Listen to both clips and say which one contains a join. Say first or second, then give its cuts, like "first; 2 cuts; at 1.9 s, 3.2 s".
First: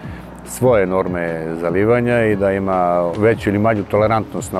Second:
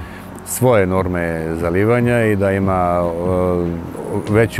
first; 1 cut; at 3.1 s